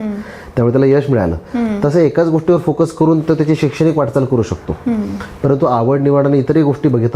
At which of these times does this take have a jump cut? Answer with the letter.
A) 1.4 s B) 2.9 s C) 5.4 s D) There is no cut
D